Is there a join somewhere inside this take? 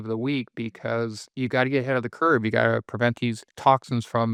no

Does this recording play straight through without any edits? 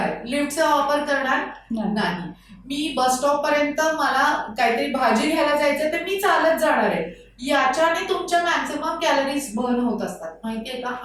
yes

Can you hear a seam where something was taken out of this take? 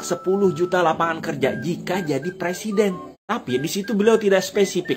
yes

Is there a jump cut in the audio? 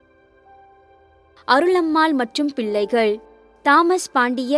yes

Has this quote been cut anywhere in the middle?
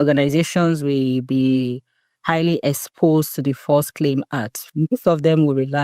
yes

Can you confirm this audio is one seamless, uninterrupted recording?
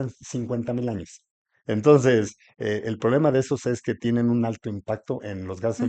yes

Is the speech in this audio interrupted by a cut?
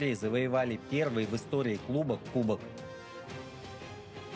yes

